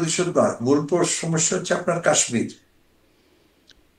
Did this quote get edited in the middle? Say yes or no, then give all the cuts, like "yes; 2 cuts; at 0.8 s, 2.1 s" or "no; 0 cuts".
no; 0 cuts